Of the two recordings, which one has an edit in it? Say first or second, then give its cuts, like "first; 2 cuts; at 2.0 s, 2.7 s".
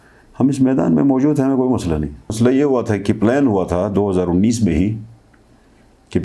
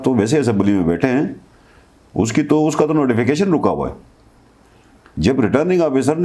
first; 1 cut; at 2.3 s